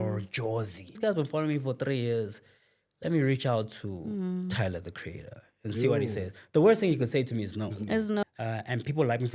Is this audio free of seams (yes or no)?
no